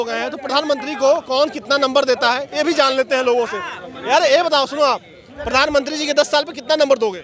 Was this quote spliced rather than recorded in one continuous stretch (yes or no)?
no